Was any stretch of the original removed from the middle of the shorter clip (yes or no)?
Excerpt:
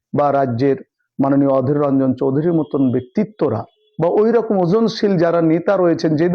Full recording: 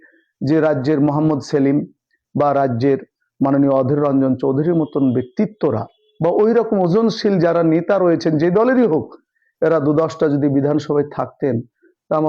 no